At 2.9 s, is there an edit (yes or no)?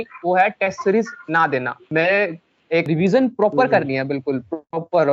yes